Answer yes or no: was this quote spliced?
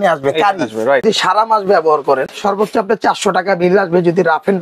yes